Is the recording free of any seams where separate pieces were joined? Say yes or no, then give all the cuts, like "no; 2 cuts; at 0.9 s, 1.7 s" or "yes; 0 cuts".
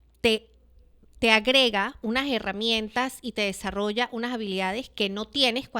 yes; 0 cuts